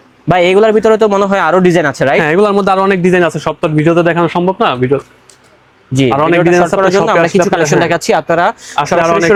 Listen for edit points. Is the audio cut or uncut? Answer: uncut